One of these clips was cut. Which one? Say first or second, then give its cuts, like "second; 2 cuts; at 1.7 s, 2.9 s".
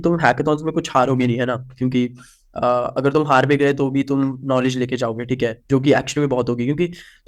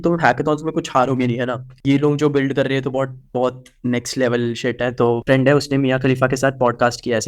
second; 2 cuts; at 1.8 s, 5.2 s